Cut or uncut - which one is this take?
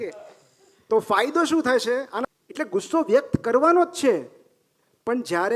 cut